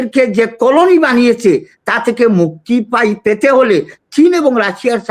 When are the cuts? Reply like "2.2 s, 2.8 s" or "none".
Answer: none